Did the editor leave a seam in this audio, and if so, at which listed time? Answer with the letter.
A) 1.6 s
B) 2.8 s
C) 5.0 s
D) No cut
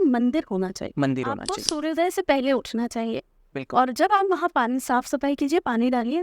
A